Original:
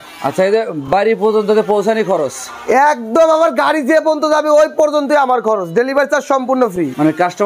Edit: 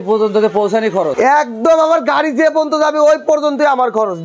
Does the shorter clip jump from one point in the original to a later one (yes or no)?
yes